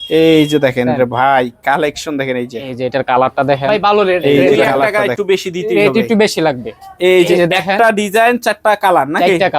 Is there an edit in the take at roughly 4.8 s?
yes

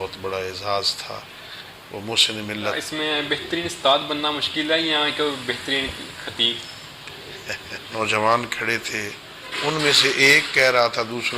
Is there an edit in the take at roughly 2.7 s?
yes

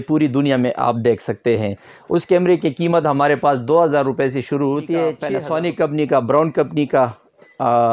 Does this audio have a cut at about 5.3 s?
yes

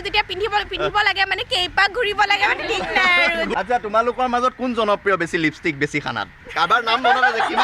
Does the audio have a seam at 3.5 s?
yes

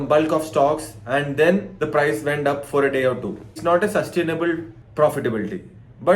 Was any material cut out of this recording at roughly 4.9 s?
no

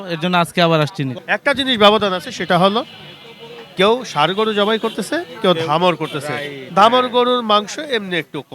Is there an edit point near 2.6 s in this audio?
no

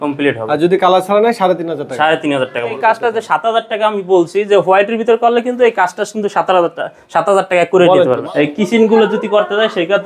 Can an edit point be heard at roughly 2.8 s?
yes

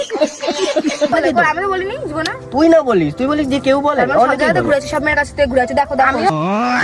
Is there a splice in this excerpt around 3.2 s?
no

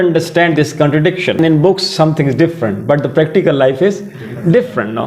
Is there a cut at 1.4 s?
yes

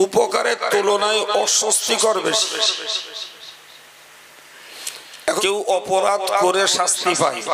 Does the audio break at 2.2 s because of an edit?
no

